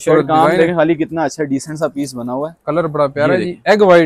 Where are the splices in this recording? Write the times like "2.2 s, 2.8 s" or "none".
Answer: none